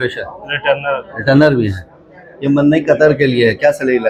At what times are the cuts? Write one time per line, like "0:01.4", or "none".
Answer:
none